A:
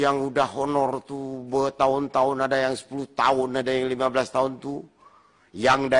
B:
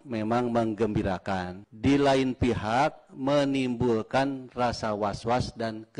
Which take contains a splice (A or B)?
B